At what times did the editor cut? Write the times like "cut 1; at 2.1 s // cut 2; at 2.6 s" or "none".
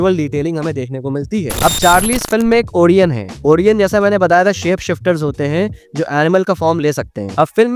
cut 1; at 1.5 s